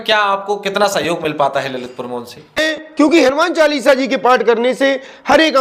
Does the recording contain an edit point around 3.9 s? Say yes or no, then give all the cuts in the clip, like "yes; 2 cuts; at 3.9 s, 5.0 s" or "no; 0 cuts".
no; 1 cut; at 2.6 s